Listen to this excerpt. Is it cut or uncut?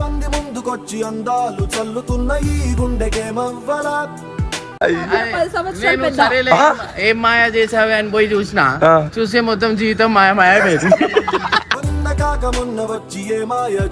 uncut